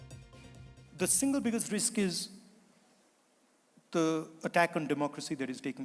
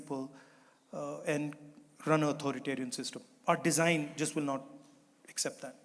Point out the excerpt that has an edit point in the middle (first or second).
first